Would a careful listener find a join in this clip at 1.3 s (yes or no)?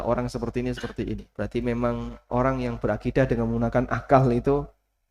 yes